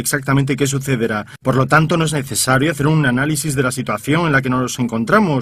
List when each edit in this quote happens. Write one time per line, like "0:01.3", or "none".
none